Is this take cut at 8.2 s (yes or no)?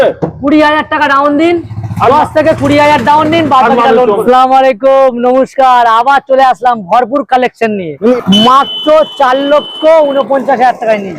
yes